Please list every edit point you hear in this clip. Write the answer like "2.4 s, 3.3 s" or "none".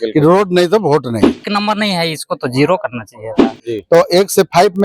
1.4 s, 3.5 s